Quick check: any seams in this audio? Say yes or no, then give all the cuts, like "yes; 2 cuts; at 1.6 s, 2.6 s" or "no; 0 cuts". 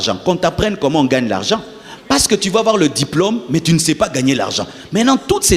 no; 0 cuts